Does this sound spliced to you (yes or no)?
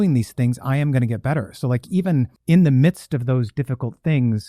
yes